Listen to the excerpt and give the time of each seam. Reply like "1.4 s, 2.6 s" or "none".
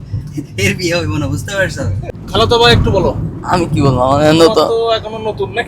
2.0 s